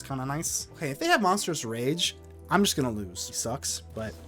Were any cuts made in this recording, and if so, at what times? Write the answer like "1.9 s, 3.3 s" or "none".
0.8 s, 3.3 s